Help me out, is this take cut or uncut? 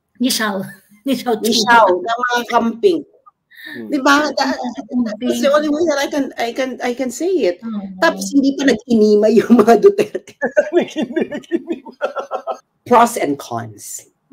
cut